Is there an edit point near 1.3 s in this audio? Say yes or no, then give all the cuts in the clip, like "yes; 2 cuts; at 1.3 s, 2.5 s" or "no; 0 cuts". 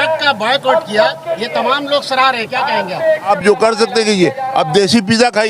no; 1 cut; at 3.3 s